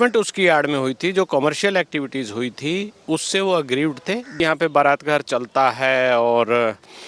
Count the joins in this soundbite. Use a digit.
1